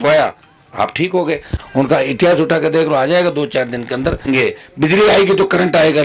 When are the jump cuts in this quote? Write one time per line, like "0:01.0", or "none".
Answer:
0:01.5
0:04.3

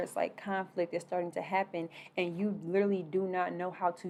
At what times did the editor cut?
none

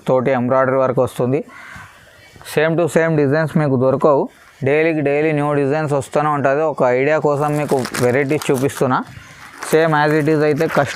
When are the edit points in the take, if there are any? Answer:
none

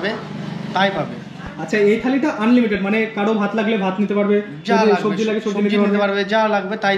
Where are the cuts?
none

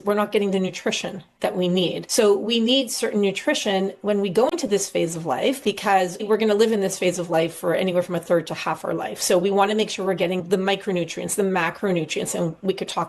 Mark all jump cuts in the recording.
0:02.0
0:06.2

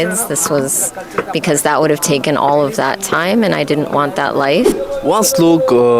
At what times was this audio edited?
0:04.8

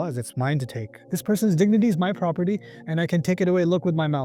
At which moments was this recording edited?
0:01.0

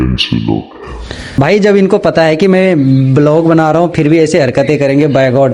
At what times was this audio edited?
0:01.3

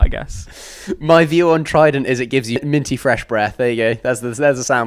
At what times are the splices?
0:02.6

